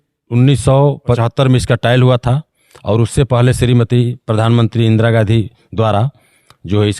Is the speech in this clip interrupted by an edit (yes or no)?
yes